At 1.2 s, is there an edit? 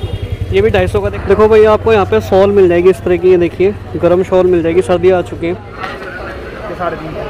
yes; 2 cuts; at 1.2 s, 5.7 s

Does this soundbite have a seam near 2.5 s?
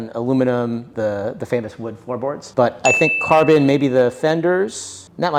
no; 0 cuts

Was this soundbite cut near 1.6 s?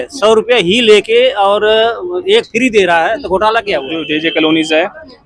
no; 1 cut; at 4.0 s

